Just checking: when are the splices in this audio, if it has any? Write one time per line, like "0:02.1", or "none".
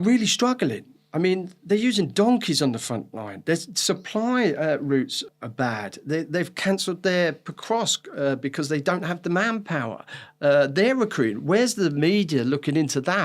0:05.2